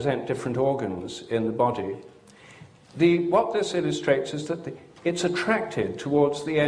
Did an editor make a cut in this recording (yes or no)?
no